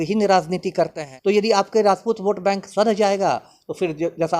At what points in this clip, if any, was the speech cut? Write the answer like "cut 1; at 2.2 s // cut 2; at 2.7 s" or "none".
cut 1; at 1.0 s